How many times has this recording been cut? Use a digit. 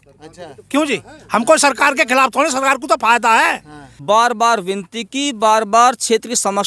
1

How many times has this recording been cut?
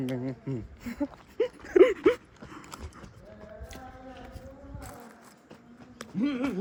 0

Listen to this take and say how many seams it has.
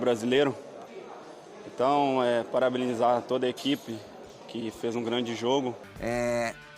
1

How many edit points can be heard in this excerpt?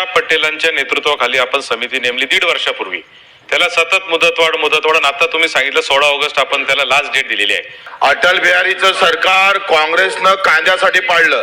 1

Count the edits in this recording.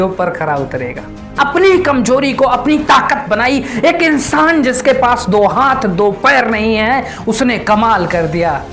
1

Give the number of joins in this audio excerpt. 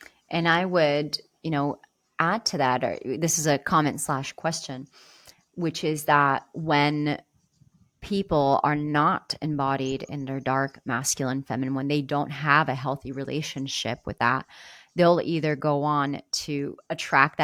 0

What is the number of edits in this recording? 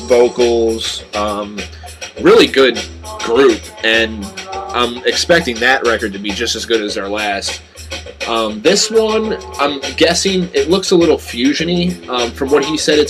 1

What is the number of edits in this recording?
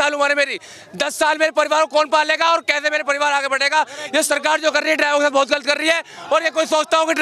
0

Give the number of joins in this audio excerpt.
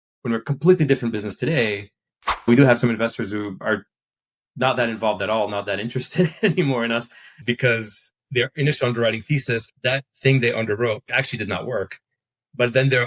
4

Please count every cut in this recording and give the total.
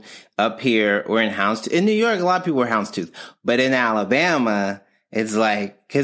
0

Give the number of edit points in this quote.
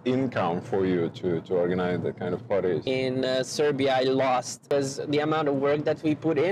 2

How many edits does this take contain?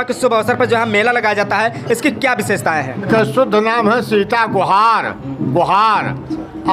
1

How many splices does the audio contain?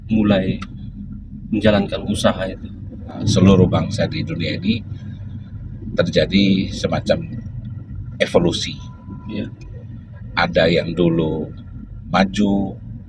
1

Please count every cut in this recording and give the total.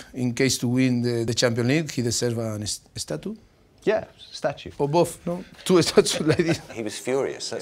3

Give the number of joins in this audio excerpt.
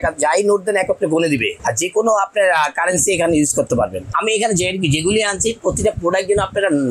2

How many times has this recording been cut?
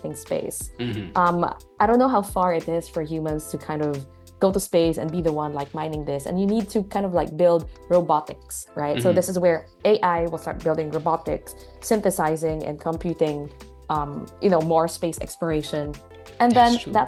0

